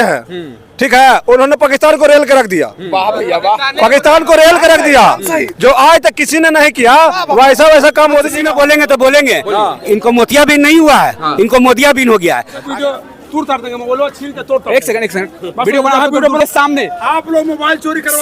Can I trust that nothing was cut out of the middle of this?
no; 2 cuts; at 8.4 s, 12.6 s

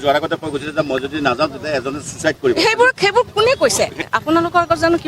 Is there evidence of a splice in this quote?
yes; 1 cut; at 4.1 s

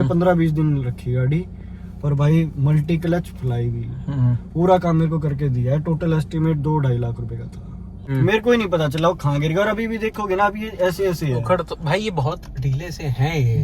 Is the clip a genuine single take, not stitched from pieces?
no; 1 cut; at 8.0 s

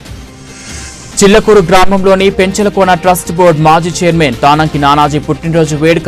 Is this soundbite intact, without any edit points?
no; 1 cut; at 1.2 s

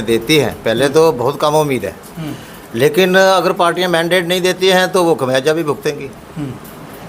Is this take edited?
no; 0 cuts

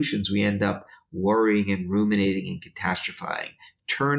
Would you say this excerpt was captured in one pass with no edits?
yes; 0 cuts

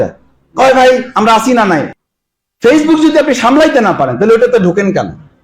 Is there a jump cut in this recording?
yes; 1 cut; at 1.9 s

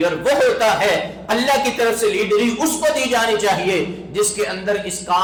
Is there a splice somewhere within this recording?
no; 0 cuts

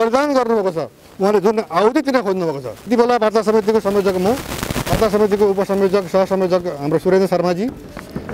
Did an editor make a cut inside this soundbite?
yes; 1 cut; at 2.9 s

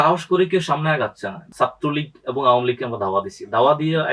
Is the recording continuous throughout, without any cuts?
no; 1 cut; at 1.5 s

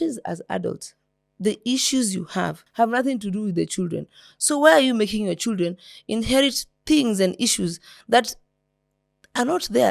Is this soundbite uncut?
no; 1 cut; at 2.6 s

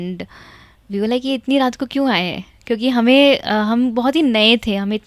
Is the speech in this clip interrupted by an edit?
no; 0 cuts

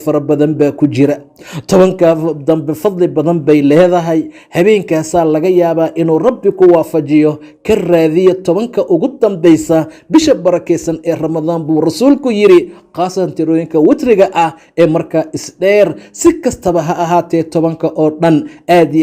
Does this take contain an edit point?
no; 0 cuts

